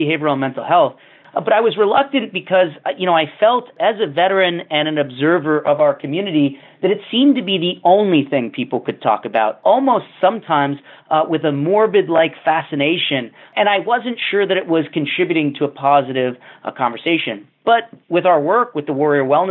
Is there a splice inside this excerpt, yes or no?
yes